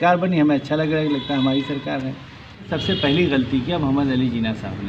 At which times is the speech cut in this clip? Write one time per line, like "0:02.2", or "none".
0:02.7